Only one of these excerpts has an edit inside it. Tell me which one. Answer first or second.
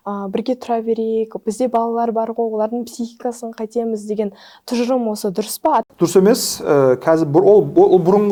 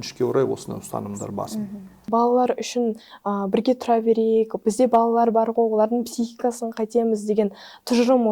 second